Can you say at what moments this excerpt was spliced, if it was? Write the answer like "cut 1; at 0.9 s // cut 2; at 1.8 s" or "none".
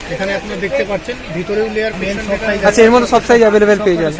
cut 1; at 1.9 s